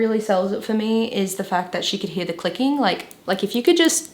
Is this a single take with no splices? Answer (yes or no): no